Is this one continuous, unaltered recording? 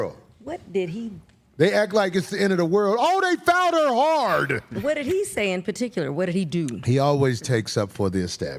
yes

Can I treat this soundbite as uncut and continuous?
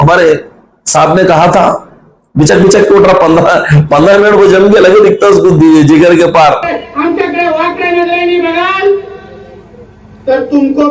no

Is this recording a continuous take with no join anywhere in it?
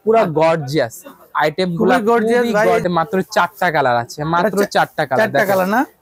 no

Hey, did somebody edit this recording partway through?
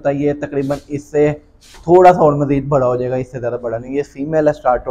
no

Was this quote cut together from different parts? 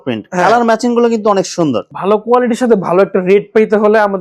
yes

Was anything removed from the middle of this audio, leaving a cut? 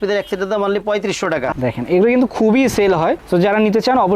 yes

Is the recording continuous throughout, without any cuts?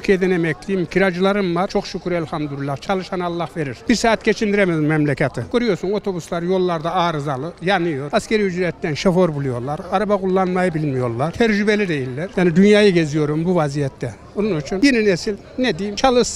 no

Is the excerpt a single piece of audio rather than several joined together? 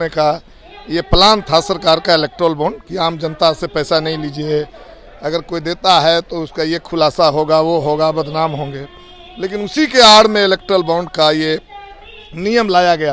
yes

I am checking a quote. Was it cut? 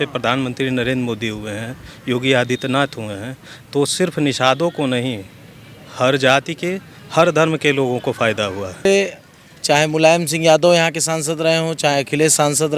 yes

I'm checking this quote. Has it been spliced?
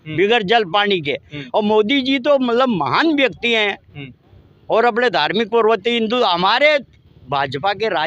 no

